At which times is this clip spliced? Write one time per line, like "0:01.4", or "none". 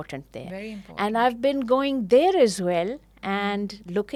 none